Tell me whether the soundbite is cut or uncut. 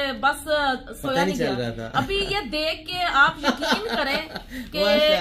uncut